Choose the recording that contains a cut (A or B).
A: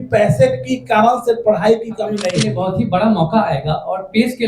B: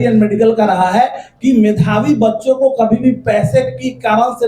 A